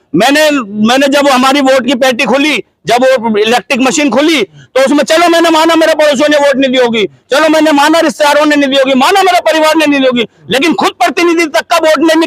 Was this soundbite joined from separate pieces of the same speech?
no; 0 cuts

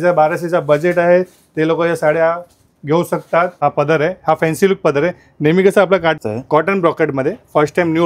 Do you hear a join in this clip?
yes; 2 cuts; at 3.5 s, 6.2 s

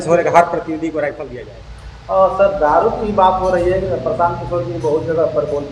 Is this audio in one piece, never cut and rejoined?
no; 1 cut; at 1.3 s

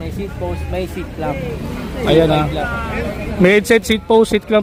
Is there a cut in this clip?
no; 0 cuts

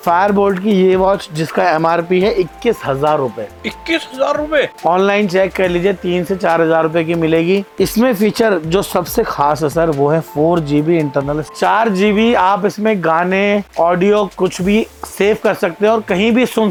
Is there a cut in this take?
no; 0 cuts

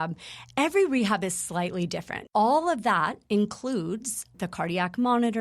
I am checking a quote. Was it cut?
yes; 1 cut; at 2.2 s

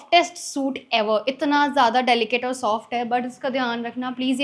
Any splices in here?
no; 0 cuts

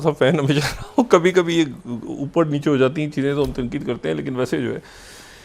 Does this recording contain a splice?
no; 0 cuts

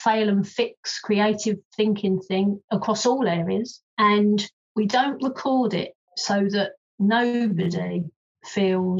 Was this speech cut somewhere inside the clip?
yes; 3 cuts; at 3.8 s, 4.6 s, 6.5 s

